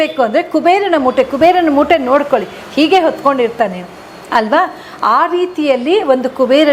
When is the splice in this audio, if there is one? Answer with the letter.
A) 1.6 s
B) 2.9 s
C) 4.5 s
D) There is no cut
D